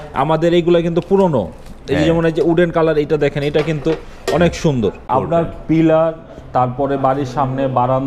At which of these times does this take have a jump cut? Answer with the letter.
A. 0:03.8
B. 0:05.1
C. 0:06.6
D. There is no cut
B